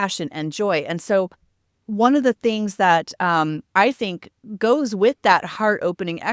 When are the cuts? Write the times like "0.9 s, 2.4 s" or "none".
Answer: none